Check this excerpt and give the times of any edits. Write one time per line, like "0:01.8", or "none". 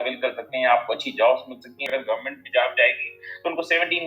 0:01.9